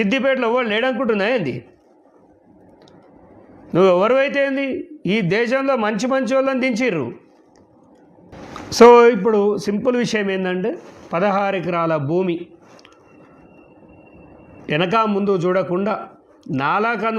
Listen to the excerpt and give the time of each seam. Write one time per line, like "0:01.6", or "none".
0:08.3